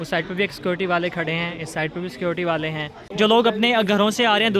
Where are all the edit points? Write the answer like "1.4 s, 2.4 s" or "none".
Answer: 3.0 s